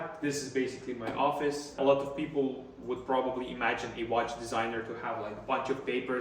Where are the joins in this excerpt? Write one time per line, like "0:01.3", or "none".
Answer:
0:01.8